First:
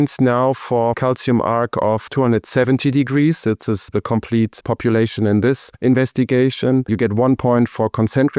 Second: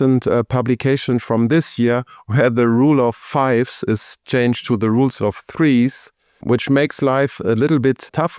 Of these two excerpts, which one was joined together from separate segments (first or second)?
first